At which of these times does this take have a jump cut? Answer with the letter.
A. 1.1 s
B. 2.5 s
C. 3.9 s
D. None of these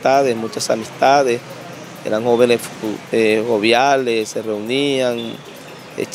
D